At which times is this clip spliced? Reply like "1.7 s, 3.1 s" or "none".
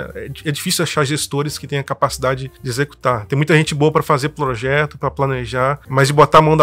2.6 s, 5.8 s